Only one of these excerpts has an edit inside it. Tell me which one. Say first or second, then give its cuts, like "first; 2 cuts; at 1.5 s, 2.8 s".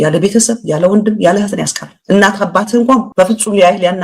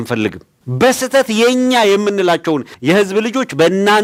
first; 1 cut; at 3.1 s